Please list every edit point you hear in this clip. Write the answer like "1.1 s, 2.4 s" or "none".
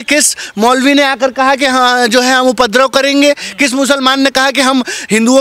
none